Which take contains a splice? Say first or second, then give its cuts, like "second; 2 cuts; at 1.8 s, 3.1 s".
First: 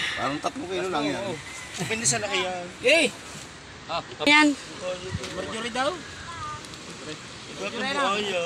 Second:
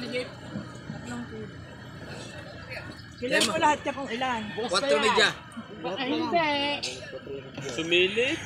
first; 1 cut; at 4.3 s